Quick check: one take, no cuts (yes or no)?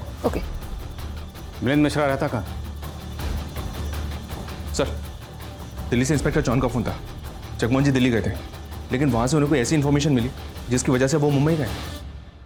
yes